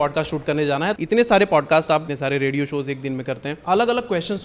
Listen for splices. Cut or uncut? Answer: cut